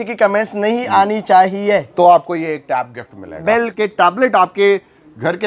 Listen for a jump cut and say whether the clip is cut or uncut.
cut